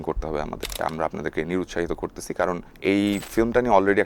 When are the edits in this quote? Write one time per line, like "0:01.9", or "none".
0:00.8
0:02.7